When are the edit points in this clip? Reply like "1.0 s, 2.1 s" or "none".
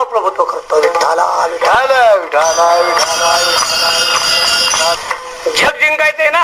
5.0 s